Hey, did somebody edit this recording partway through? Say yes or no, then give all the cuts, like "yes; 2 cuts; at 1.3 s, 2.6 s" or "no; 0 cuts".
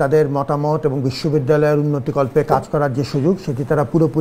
no; 0 cuts